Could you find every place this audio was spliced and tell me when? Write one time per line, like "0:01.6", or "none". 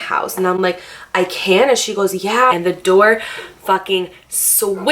0:02.5